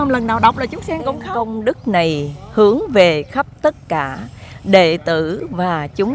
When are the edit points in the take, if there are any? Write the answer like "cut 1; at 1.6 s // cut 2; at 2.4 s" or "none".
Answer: cut 1; at 1.2 s